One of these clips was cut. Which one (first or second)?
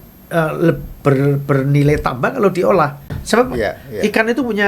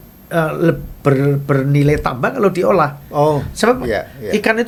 first